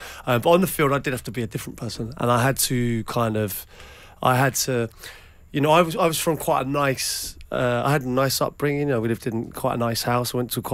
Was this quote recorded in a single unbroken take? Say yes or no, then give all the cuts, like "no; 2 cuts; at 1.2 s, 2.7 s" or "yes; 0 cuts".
yes; 0 cuts